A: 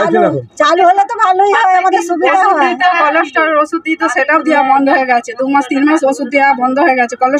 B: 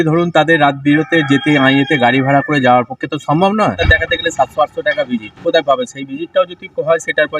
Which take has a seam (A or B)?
B